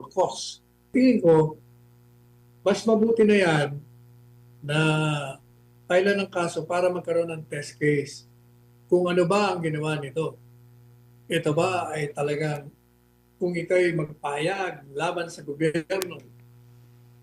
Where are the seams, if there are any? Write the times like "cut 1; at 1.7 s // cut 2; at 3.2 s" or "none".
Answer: cut 1; at 0.9 s

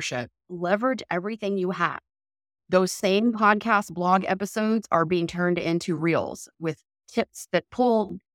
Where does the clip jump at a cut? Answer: cut 1; at 6.5 s

